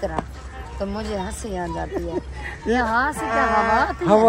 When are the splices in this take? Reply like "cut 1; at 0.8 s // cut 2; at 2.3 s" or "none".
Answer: none